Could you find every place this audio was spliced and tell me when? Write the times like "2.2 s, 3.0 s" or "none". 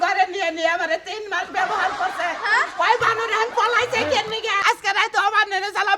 4.6 s